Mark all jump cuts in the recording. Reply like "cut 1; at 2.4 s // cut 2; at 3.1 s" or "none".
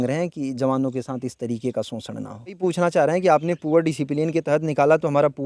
cut 1; at 2.6 s